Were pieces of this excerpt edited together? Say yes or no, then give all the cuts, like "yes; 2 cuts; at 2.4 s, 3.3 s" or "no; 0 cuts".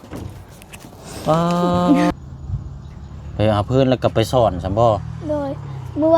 yes; 1 cut; at 2.1 s